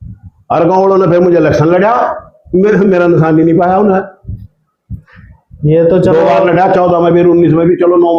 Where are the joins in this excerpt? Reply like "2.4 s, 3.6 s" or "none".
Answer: none